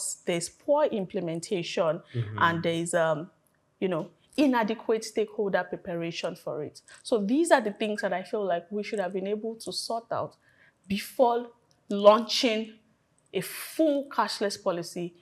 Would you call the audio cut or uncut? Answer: uncut